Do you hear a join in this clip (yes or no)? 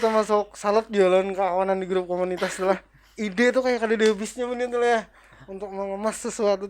no